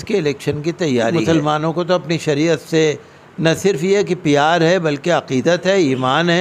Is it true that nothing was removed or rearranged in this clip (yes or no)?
no